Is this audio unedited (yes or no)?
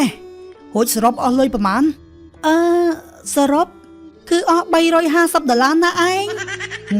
yes